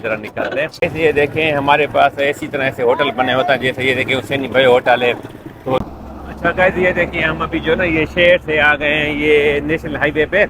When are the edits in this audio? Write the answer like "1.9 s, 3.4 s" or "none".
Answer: 0.8 s, 5.8 s